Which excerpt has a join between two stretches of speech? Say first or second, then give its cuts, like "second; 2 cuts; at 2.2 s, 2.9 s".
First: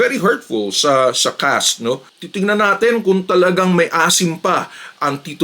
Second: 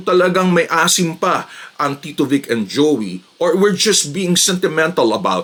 first; 1 cut; at 2.1 s